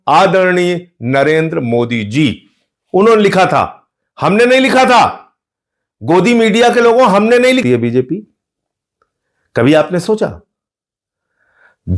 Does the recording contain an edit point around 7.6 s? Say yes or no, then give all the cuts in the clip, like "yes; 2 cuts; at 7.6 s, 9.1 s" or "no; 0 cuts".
yes; 1 cut; at 7.6 s